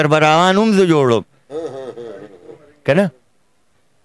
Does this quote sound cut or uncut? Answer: uncut